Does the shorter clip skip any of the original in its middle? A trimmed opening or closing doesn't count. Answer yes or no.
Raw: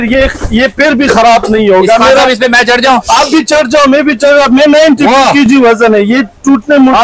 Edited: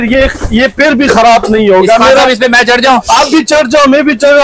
no